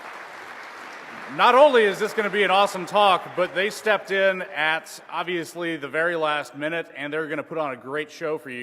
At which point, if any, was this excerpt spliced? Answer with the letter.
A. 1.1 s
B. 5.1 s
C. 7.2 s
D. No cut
C